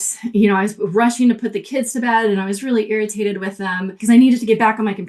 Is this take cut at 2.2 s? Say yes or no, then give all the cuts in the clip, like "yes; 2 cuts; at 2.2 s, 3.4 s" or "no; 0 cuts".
no; 1 cut; at 4.0 s